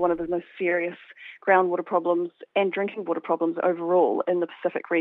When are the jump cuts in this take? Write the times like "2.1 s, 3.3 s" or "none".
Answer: none